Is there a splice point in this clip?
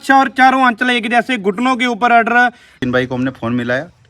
yes; 1 cut; at 2.7 s

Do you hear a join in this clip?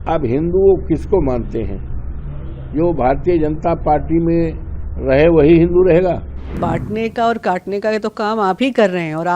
yes; 1 cut; at 6.6 s

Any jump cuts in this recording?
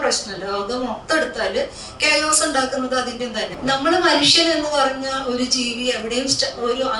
yes; 1 cut; at 3.5 s

